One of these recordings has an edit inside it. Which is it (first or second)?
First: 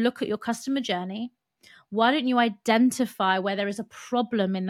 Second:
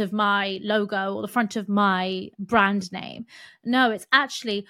second